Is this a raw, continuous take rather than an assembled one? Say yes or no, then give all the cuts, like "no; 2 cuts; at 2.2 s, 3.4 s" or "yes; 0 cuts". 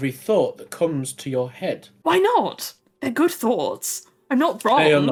yes; 0 cuts